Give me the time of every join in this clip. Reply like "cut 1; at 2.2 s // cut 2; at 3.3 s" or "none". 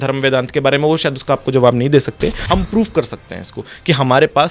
cut 1; at 2.4 s